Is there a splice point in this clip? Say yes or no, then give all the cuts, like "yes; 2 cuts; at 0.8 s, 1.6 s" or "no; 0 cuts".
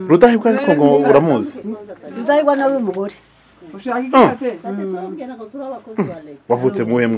no; 0 cuts